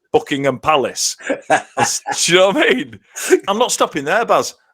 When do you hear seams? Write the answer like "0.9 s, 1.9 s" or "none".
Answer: 3.4 s